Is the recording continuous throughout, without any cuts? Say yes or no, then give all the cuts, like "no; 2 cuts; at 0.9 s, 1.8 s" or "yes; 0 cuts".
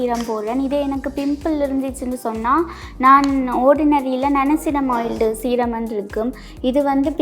yes; 0 cuts